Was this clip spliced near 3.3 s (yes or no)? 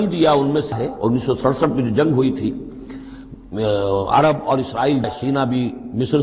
no